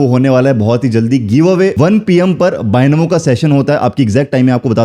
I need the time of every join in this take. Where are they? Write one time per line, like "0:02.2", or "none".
0:01.7